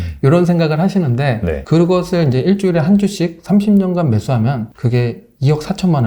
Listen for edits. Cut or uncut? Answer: cut